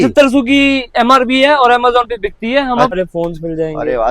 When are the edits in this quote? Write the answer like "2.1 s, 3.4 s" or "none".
2.9 s